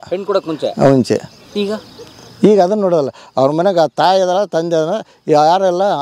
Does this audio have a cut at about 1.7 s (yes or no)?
yes